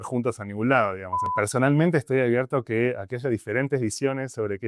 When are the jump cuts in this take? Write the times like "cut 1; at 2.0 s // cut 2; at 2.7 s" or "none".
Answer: cut 1; at 1.3 s